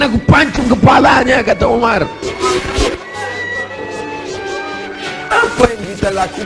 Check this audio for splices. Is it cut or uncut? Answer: cut